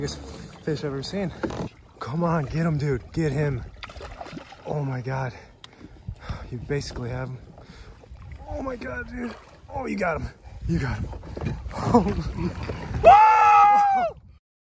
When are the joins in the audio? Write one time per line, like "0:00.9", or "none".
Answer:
0:01.8

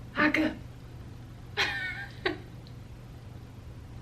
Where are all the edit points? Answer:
none

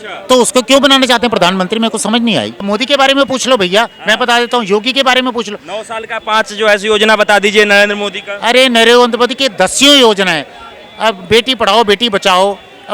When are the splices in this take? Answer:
0:02.6

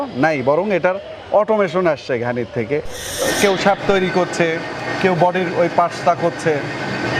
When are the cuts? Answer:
0:03.2

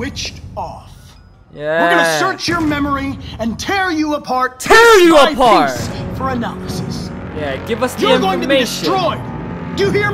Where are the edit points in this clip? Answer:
none

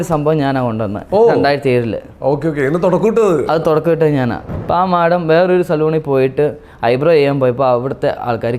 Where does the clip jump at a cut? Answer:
0:04.5

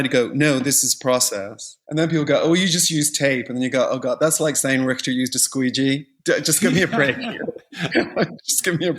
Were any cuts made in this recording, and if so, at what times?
0:07.9

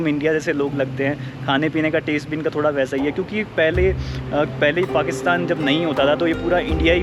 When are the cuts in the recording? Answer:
none

